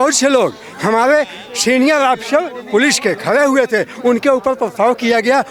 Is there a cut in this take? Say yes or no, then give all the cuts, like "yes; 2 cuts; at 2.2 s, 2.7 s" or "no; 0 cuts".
no; 0 cuts